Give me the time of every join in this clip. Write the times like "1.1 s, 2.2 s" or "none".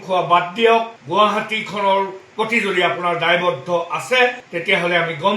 1.0 s

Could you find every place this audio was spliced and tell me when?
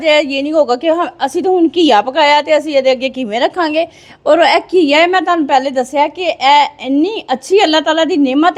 none

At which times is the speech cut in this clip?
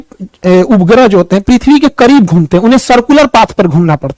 none

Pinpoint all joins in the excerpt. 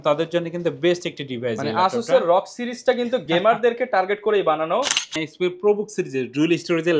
5.2 s

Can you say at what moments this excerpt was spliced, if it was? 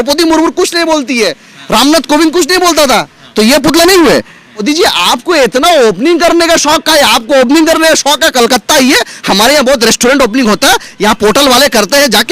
4.6 s

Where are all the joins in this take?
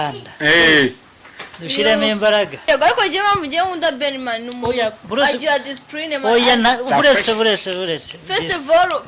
2.6 s

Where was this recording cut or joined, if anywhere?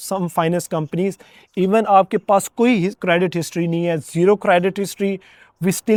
none

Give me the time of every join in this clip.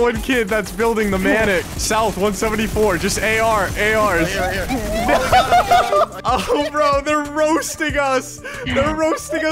6.2 s

